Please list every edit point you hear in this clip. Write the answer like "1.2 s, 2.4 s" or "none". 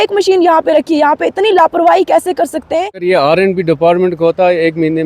2.9 s